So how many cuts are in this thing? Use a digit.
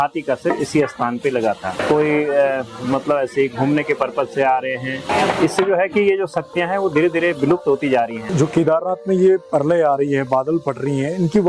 3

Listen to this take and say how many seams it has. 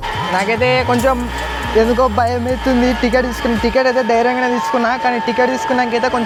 0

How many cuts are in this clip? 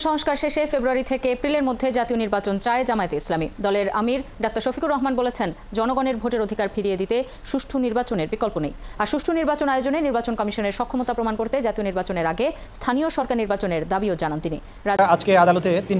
1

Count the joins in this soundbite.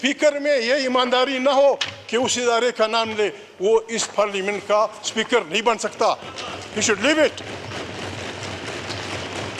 0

